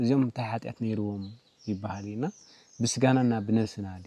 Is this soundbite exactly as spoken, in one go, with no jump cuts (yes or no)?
yes